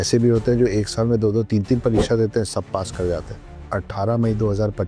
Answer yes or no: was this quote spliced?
yes